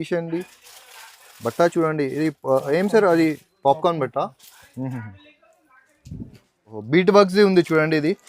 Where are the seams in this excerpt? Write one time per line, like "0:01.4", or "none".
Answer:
0:06.8

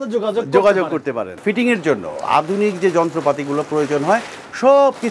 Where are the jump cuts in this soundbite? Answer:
0:01.4

